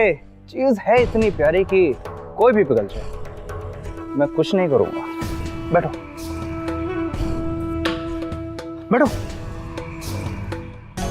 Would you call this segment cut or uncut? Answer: uncut